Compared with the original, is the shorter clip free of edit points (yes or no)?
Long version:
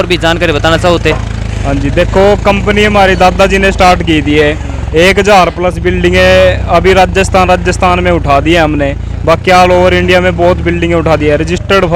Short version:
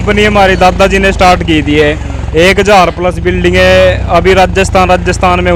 yes